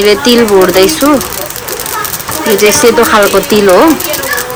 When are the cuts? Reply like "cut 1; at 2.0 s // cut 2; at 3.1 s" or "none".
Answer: none